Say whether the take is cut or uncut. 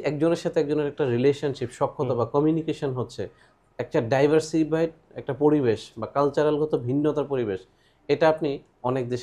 uncut